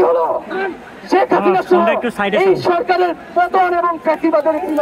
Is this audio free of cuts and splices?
yes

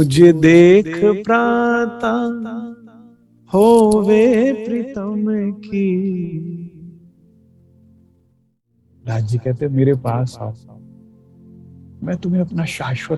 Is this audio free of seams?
no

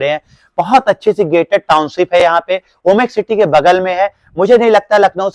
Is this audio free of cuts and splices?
yes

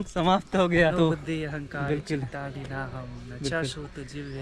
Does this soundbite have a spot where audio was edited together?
yes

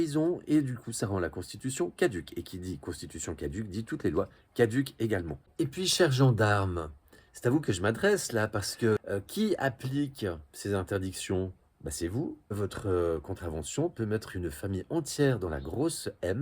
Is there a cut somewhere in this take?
yes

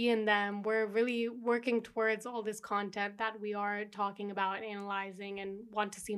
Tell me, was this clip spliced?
no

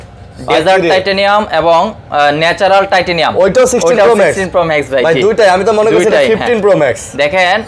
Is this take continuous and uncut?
yes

